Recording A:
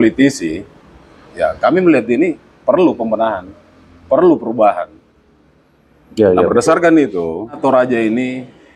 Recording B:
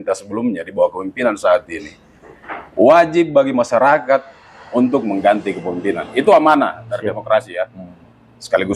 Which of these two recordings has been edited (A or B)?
A